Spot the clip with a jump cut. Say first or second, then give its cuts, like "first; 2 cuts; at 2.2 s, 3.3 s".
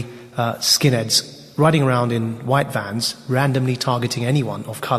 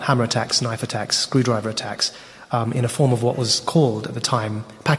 first; 1 cut; at 2.4 s